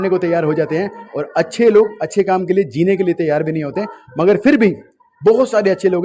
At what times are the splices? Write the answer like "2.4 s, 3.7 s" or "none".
none